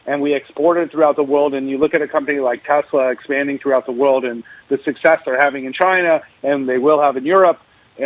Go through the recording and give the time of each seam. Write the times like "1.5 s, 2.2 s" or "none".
none